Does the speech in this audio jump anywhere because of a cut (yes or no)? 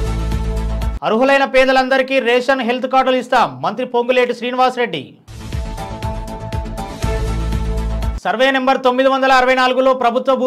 yes